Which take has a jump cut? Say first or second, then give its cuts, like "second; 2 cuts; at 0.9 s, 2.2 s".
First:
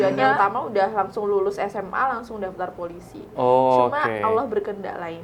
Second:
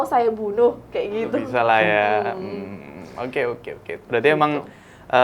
second; 1 cut; at 1.4 s